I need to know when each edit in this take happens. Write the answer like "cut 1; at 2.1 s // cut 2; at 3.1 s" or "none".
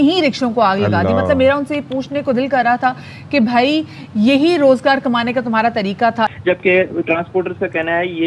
cut 1; at 6.3 s